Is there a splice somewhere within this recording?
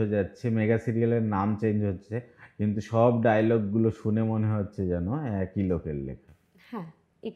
no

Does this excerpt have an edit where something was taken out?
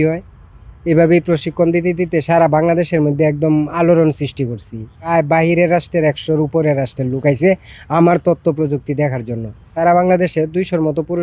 yes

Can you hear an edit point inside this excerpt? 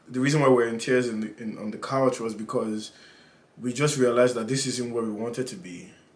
no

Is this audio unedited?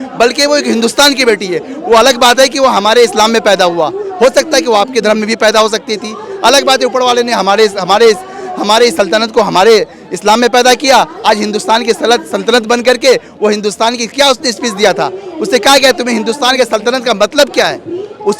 yes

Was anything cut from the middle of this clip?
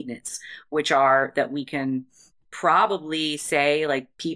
no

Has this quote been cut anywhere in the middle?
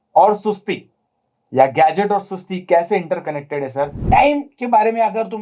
yes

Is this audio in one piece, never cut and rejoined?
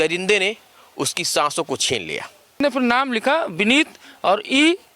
no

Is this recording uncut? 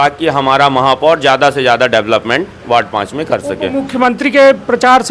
yes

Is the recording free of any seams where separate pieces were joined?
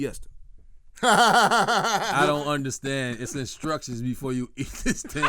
no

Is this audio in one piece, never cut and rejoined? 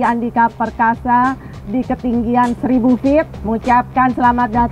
no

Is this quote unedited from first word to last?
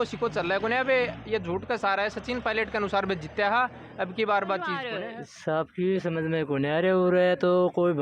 no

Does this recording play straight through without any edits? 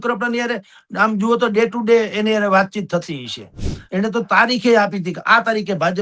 no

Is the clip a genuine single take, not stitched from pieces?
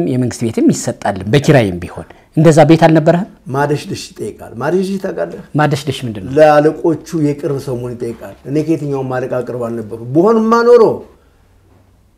yes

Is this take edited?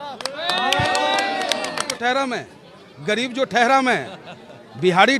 yes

